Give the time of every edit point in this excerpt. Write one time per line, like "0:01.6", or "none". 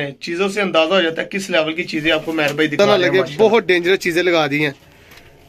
0:02.8